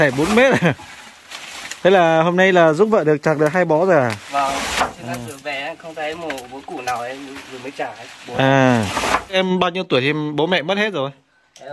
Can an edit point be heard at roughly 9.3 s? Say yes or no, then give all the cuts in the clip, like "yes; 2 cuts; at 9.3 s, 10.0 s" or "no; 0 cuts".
yes; 1 cut; at 9.3 s